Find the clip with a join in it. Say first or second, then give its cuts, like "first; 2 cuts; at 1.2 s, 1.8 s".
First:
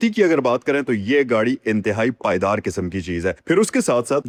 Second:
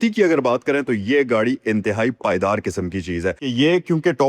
second; 1 cut; at 3.4 s